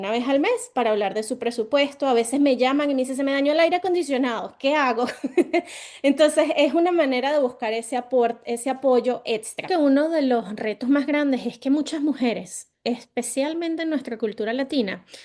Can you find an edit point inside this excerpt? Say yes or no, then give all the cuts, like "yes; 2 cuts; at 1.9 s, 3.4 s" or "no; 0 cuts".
yes; 1 cut; at 9.7 s